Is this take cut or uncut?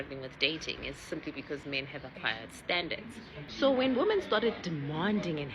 cut